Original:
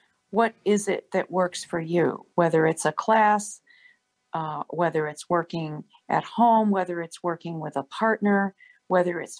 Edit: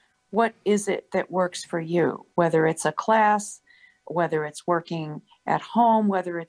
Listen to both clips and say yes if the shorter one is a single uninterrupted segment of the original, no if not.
no